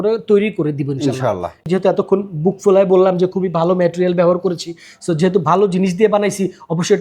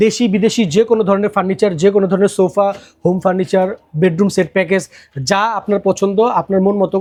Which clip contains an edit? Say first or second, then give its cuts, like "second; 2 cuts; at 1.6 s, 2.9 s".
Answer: first; 1 cut; at 1.6 s